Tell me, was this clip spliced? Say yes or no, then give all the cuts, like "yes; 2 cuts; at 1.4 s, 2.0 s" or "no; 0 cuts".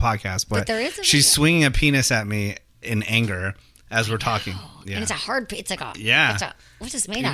no; 0 cuts